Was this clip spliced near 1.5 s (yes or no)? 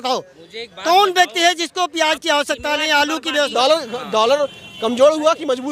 no